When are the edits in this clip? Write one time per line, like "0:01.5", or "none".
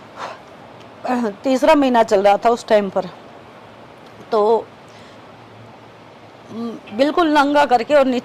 none